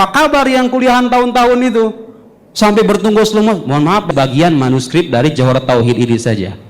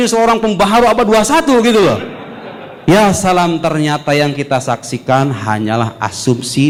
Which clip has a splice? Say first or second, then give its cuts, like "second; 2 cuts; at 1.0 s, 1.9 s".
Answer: first; 1 cut; at 4.1 s